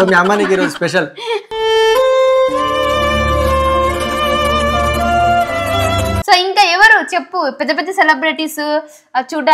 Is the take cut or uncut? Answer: cut